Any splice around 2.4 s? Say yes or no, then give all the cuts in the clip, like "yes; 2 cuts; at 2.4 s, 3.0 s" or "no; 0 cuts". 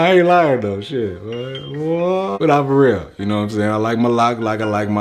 yes; 1 cut; at 2.4 s